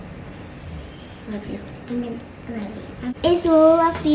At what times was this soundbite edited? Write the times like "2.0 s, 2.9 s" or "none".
3.0 s